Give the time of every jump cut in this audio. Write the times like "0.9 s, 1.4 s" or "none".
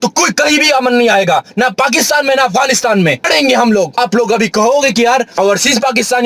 3.3 s, 4.0 s, 5.3 s